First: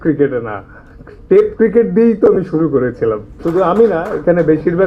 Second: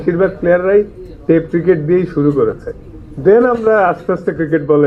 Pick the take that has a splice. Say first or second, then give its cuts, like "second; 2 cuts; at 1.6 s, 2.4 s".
first; 1 cut; at 3.3 s